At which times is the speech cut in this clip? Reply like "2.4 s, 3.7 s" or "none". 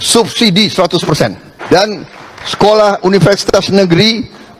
1.6 s